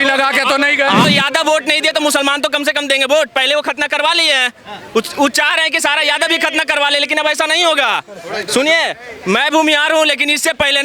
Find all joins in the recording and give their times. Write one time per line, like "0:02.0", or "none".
0:01.1